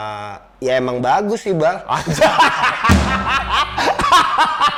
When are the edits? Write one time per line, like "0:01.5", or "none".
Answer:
none